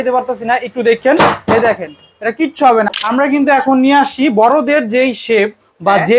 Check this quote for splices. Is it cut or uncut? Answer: cut